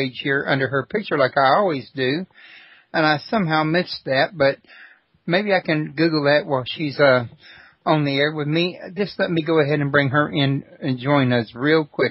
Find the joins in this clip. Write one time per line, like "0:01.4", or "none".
0:06.4